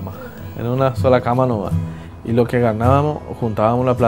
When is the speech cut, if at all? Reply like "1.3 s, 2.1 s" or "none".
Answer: 2.1 s